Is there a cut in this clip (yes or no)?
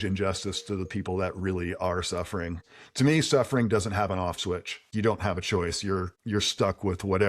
yes